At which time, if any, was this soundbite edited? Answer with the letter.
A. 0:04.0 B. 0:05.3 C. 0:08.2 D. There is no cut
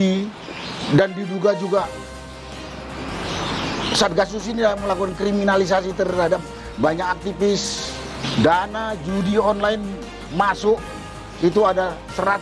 C